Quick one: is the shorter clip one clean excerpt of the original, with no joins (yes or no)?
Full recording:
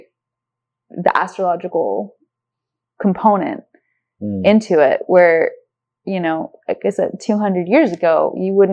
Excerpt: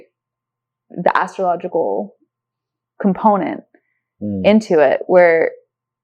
yes